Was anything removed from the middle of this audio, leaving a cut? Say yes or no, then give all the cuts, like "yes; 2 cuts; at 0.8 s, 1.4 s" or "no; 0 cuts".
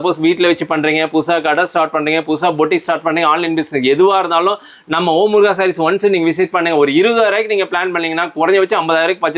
no; 0 cuts